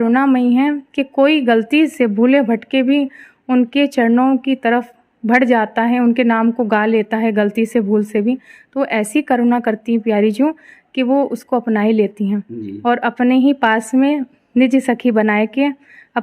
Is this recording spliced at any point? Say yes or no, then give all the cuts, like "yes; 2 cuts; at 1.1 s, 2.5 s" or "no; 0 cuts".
no; 0 cuts